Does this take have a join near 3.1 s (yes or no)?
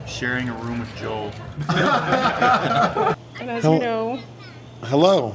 yes